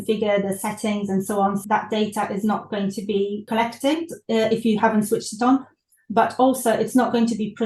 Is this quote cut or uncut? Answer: cut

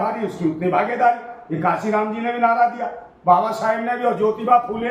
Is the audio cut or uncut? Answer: uncut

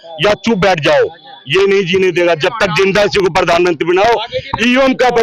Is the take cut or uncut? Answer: uncut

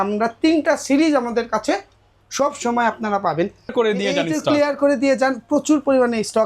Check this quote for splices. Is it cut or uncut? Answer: cut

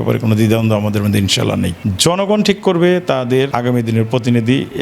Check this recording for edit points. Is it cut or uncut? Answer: cut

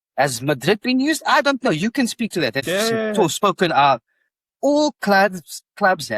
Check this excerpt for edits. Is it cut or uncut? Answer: cut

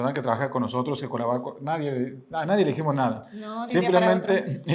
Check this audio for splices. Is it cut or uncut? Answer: uncut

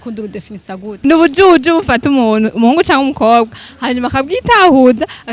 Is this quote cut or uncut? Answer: cut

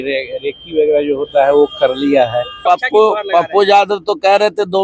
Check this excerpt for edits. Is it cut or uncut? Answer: cut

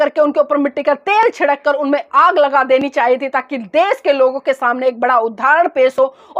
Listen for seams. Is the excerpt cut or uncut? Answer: uncut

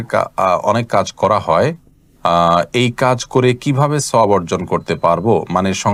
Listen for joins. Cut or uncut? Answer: uncut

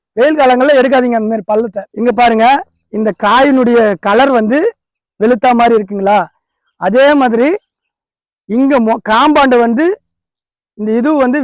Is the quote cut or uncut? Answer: cut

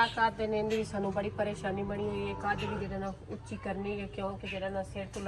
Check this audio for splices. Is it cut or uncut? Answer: uncut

